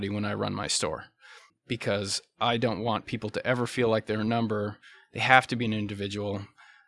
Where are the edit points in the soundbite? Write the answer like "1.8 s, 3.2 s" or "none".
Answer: 1.5 s